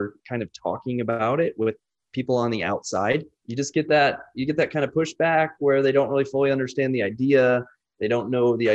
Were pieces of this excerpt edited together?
yes; 1 cut; at 3.4 s

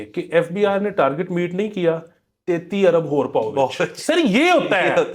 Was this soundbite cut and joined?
no; 0 cuts

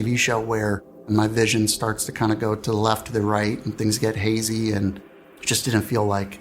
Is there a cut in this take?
yes; 1 cut; at 1.0 s

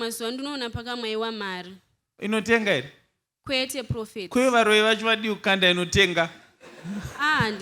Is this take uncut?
yes; 0 cuts

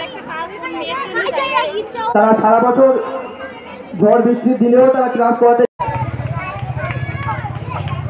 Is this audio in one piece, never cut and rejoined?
no; 1 cut; at 5.7 s

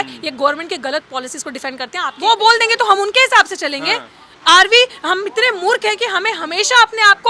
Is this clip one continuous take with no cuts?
no; 1 cut; at 2.0 s

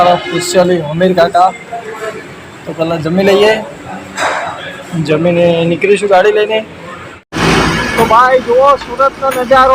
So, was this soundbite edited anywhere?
yes; 1 cut; at 7.2 s

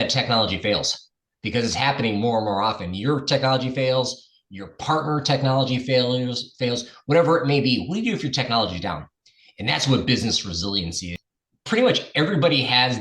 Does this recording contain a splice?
yes; 1 cut; at 11.1 s

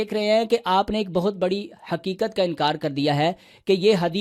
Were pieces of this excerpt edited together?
no; 0 cuts

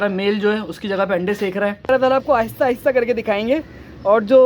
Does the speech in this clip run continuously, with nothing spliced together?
no; 1 cut; at 1.9 s

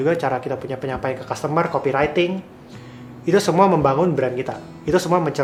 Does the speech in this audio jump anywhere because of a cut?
no; 0 cuts

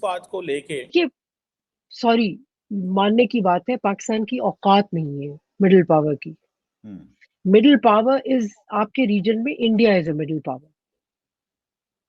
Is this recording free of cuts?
no; 1 cut; at 0.9 s

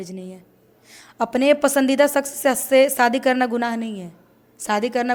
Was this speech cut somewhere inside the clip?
no; 0 cuts

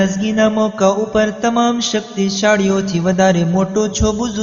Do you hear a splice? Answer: no; 0 cuts

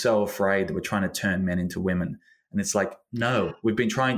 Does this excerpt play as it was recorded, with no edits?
yes; 0 cuts

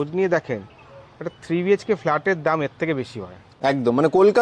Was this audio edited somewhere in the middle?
yes; 1 cut; at 3.5 s

